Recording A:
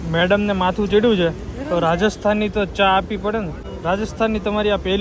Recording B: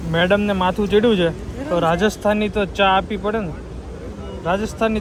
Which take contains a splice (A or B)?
A